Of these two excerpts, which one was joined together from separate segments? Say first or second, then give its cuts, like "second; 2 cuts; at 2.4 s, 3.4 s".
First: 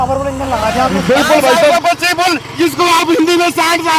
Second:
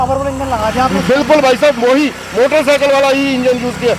first; 1 cut; at 1.7 s